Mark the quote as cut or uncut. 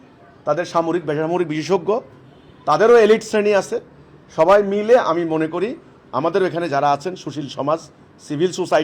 uncut